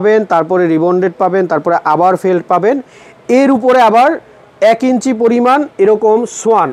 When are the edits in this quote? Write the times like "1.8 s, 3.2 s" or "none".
none